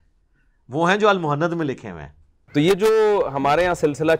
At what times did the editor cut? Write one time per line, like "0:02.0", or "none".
0:02.4